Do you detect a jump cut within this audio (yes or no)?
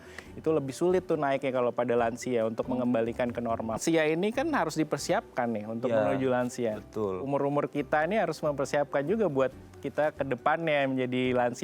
yes